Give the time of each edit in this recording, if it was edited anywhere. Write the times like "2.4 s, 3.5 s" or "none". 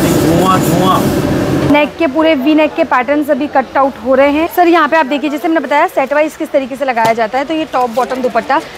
1.7 s, 4.5 s